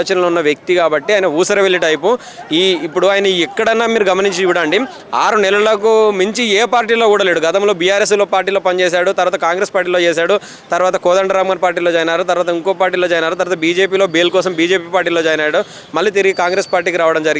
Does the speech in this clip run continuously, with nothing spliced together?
yes; 0 cuts

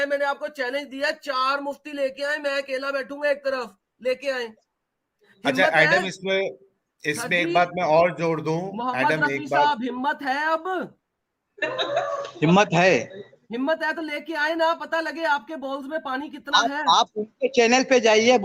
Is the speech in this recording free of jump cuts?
yes; 0 cuts

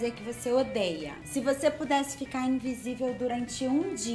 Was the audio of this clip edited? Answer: yes; 1 cut; at 1.1 s

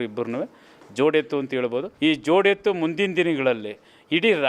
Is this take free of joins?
no; 1 cut; at 1.9 s

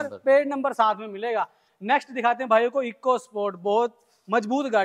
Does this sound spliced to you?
no; 0 cuts

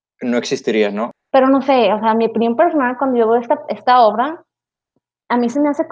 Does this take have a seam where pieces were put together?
yes; 1 cut; at 1.1 s

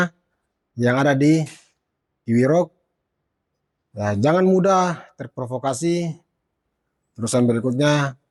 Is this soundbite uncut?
yes; 0 cuts

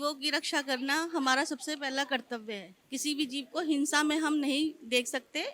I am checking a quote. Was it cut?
no; 0 cuts

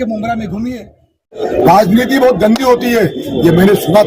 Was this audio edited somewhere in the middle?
yes; 1 cut; at 1.4 s

